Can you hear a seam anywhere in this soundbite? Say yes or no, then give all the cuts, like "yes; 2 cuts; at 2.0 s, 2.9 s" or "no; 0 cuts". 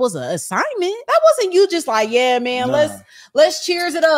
yes; 1 cut; at 1.0 s